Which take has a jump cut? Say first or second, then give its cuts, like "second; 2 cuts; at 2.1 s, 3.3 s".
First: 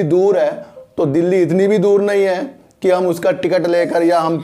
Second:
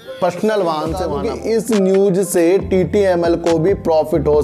second; 1 cut; at 1.2 s